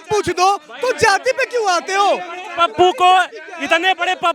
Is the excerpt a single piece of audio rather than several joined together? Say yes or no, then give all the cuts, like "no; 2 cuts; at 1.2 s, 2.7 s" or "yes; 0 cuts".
yes; 0 cuts